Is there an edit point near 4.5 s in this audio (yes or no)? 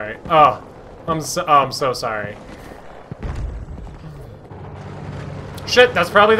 yes